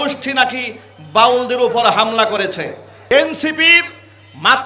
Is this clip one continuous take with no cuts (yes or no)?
no